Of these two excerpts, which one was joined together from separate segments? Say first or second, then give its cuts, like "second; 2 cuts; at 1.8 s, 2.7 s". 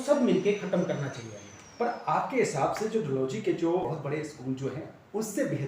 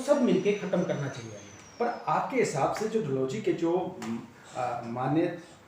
first; 1 cut; at 3.8 s